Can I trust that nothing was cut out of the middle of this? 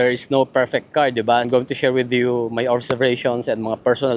no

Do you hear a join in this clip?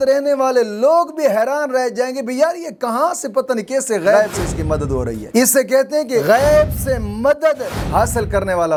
no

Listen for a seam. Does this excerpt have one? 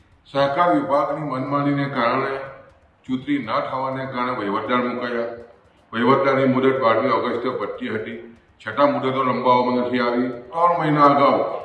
yes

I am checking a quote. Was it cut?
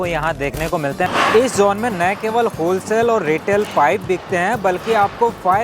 yes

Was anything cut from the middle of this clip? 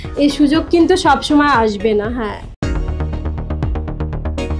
yes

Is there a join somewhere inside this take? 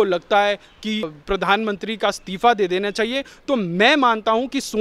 yes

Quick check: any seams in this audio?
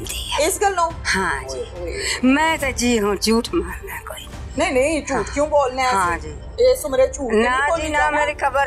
no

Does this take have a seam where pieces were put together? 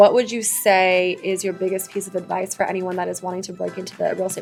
no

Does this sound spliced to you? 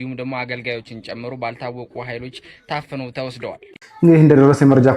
yes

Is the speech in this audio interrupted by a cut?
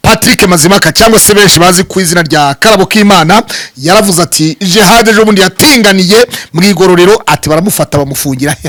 no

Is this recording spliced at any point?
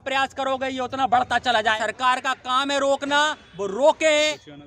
yes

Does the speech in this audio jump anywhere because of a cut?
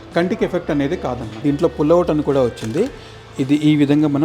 yes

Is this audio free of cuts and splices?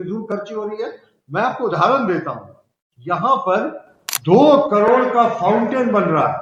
yes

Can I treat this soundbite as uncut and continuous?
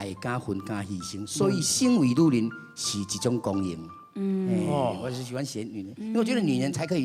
yes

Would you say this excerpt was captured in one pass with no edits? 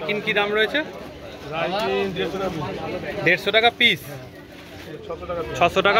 no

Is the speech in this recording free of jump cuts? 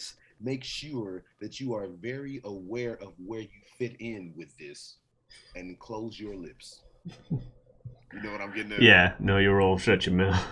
yes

